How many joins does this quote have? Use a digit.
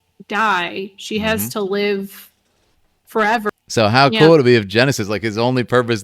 1